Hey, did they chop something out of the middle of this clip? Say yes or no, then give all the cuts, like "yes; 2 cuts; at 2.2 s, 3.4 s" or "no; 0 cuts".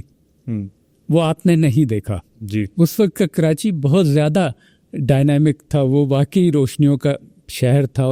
no; 0 cuts